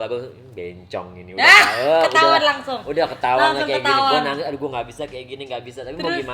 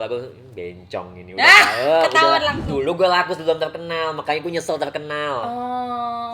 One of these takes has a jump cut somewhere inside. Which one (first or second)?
second